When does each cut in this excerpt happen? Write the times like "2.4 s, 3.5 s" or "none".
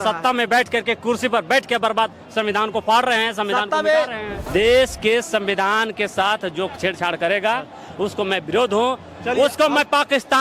4.3 s, 6.7 s